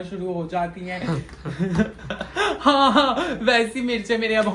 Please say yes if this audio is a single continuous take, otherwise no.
yes